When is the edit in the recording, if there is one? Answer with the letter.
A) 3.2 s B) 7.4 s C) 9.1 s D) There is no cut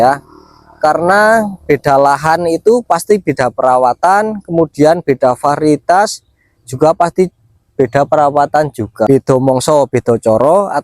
C